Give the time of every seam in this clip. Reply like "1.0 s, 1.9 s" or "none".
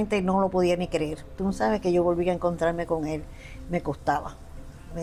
none